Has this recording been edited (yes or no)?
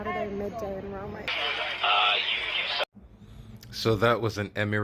yes